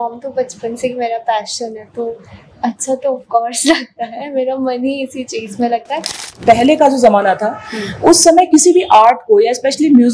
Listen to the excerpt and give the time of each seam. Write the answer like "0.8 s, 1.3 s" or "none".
6.3 s